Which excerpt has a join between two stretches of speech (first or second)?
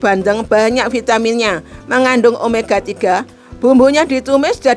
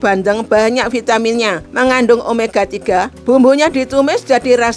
second